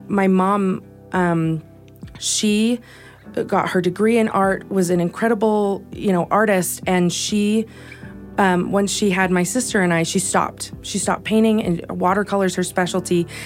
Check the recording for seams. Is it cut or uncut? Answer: uncut